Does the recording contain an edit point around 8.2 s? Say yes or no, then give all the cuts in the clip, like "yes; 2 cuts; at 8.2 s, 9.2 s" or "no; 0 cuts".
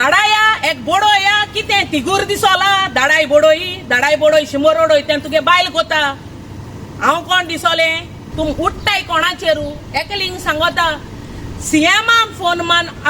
yes; 1 cut; at 8.2 s